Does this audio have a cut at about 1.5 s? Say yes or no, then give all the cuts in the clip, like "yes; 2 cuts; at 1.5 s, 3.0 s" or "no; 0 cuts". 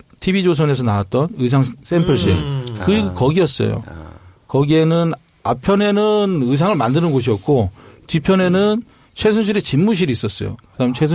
yes; 1 cut; at 1.5 s